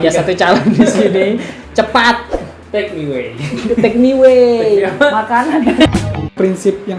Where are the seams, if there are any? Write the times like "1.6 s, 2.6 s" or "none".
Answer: 5.9 s